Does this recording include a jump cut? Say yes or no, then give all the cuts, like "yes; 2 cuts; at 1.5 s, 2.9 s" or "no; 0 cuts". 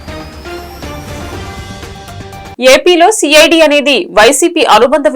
yes; 1 cut; at 2.5 s